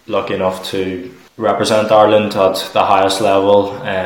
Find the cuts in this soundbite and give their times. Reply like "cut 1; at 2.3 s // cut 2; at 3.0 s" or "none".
cut 1; at 1.2 s

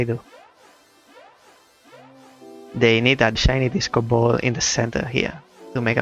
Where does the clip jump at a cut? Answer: cut 1; at 3.4 s

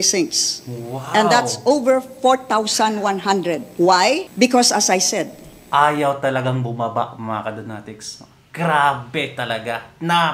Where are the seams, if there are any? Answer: cut 1; at 3.7 s // cut 2; at 4.3 s

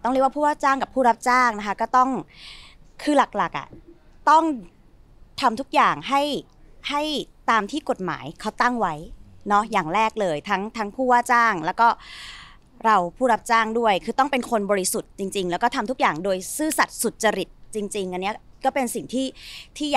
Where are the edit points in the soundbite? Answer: none

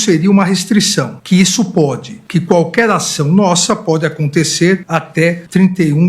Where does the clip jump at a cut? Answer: cut 1; at 1.2 s // cut 2; at 5.2 s

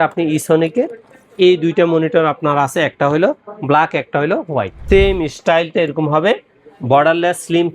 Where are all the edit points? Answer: cut 1; at 4.8 s

